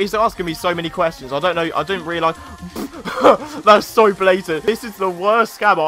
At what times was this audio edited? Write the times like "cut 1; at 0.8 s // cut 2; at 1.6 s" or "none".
cut 1; at 4.6 s